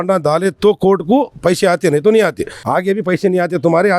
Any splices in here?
yes; 1 cut; at 2.6 s

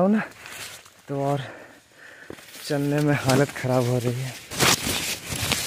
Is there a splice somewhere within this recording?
yes; 1 cut; at 4.4 s

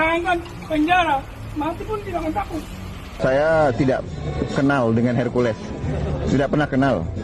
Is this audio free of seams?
no; 1 cut; at 3.2 s

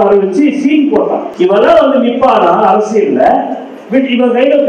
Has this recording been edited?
yes; 1 cut; at 1.3 s

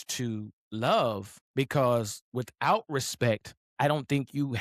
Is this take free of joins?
no; 2 cuts; at 1.3 s, 3.6 s

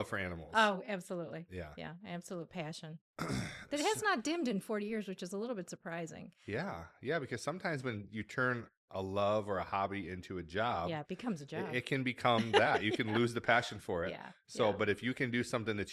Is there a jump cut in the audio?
no; 0 cuts

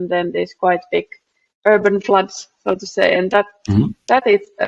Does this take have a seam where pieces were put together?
no; 0 cuts

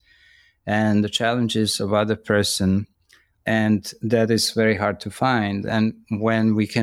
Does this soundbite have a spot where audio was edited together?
no; 0 cuts

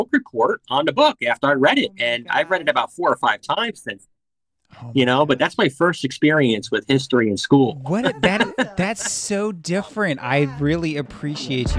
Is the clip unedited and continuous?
yes; 0 cuts

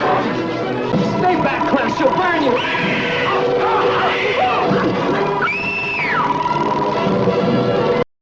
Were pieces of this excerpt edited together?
yes; 1 cut; at 0.9 s

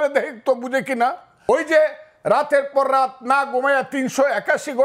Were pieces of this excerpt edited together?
yes; 1 cut; at 1.3 s

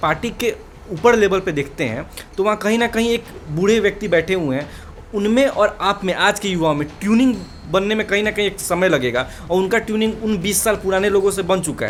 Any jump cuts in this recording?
no; 0 cuts

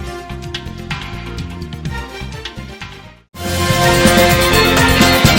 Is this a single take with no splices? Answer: yes; 0 cuts

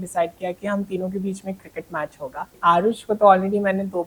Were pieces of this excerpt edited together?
yes; 1 cut; at 2.6 s

